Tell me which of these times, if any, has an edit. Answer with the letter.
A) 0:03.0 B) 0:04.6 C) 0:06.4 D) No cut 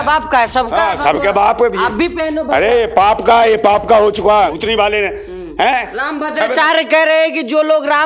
B